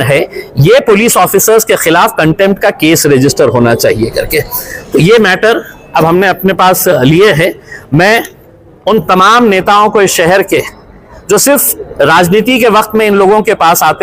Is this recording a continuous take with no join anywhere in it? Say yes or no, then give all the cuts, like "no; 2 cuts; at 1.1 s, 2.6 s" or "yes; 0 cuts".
yes; 0 cuts